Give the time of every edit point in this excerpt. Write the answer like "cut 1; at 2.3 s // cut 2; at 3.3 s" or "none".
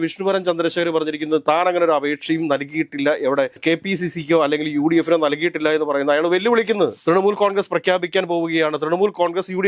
cut 1; at 3.6 s // cut 2; at 7.0 s